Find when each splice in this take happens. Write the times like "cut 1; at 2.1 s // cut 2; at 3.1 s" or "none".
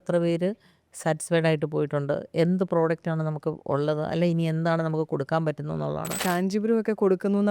cut 1; at 6.2 s